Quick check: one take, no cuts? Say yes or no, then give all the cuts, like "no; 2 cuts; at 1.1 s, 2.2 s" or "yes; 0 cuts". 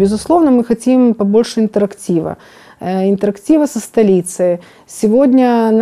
yes; 0 cuts